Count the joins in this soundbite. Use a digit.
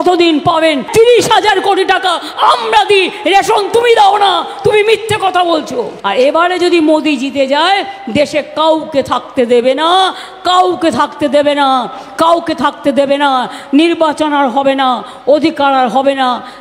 2